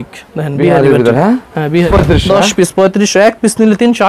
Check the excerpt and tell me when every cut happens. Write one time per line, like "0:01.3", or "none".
0:01.9